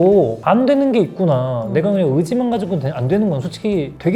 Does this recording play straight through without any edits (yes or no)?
yes